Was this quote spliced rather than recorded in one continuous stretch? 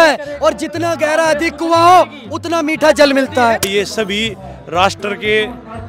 yes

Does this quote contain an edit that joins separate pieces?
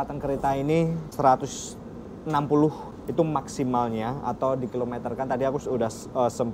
yes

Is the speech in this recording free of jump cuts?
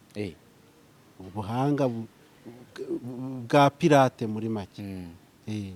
yes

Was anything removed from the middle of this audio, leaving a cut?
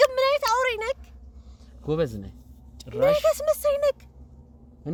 no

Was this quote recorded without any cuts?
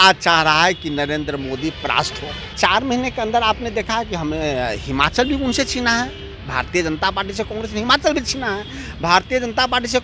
no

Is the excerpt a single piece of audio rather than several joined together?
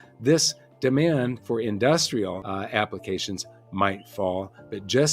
no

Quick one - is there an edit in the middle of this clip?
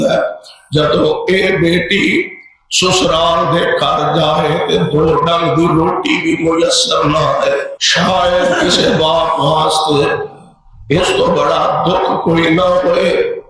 yes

